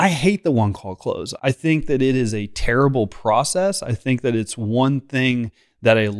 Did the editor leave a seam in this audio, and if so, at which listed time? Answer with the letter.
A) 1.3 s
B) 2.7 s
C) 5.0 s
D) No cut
A